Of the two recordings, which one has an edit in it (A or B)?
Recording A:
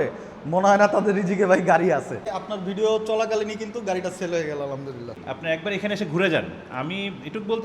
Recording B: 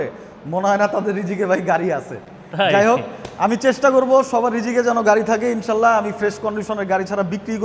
A